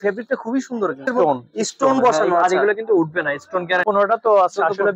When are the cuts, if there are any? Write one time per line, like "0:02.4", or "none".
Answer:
0:01.1
0:03.8